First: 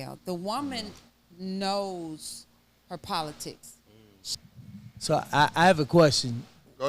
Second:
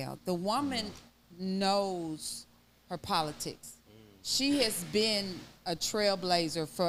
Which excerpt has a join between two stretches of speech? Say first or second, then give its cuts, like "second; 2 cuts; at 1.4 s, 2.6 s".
first; 1 cut; at 4.3 s